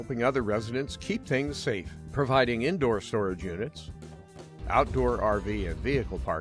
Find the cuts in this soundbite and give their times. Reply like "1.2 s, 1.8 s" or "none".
none